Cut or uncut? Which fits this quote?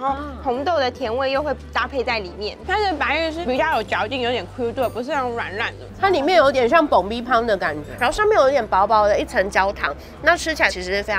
cut